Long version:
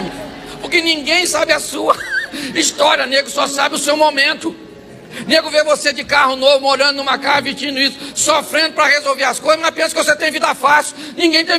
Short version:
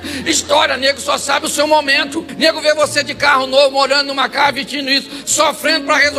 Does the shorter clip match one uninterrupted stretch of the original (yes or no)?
no